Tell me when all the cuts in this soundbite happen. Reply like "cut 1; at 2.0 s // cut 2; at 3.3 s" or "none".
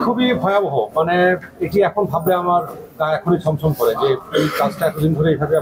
none